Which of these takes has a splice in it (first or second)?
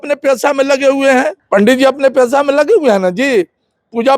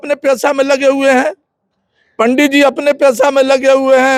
first